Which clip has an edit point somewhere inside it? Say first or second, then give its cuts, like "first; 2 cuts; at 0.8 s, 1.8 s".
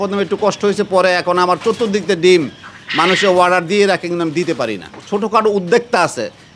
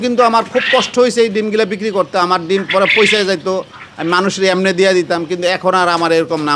first; 1 cut; at 4.9 s